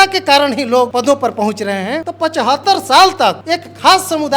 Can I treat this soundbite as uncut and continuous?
no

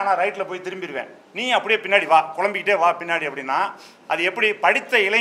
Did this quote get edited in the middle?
no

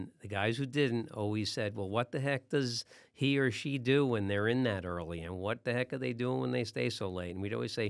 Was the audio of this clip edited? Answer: no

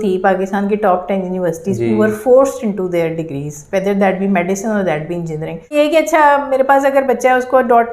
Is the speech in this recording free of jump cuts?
no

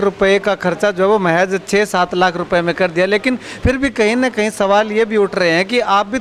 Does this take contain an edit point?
no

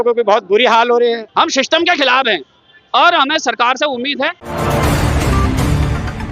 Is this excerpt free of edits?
no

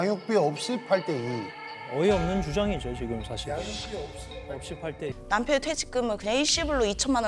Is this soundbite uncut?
no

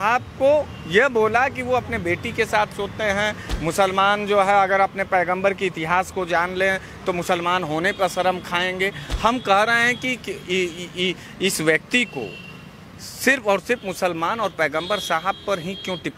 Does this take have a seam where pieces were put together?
no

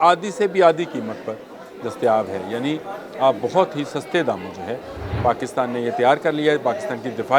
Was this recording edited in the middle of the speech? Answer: no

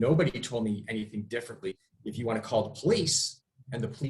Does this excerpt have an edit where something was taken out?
yes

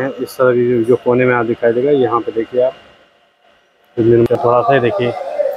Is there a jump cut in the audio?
yes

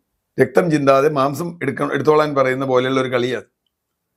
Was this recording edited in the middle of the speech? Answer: no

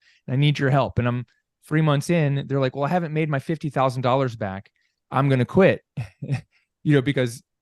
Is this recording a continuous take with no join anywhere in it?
yes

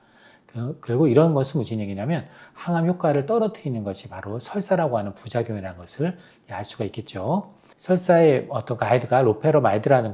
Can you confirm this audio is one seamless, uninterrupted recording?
no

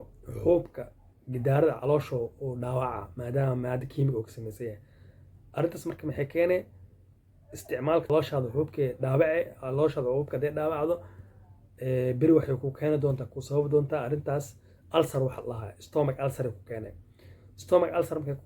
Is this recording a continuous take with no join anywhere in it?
no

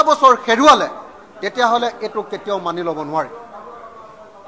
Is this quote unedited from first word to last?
yes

